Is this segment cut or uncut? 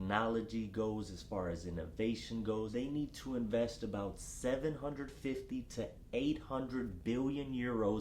cut